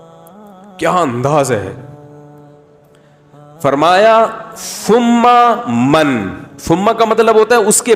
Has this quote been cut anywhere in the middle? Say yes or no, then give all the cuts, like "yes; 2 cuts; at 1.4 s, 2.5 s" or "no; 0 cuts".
yes; 3 cuts; at 0.8 s, 1.8 s, 3.6 s